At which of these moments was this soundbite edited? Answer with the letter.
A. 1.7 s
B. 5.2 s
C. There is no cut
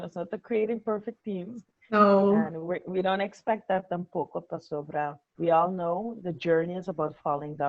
B